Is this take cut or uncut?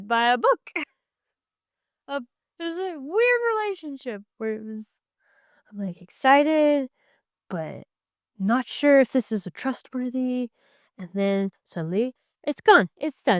uncut